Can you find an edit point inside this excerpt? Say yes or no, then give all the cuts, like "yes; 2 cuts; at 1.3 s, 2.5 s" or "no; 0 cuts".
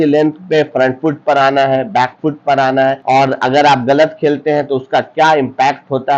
yes; 1 cut; at 3.0 s